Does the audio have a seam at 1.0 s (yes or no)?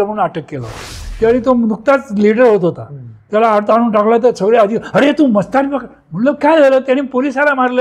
yes